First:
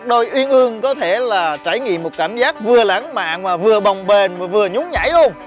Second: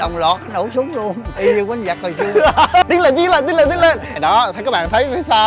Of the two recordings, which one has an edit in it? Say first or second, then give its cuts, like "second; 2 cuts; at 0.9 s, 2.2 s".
second; 3 cuts; at 1.3 s, 2.9 s, 4.1 s